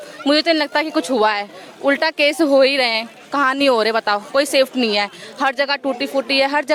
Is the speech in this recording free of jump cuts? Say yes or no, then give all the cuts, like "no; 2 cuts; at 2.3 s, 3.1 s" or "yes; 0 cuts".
yes; 0 cuts